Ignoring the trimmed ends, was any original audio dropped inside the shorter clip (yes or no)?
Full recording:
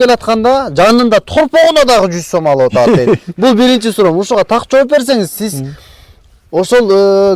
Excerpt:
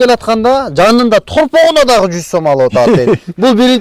no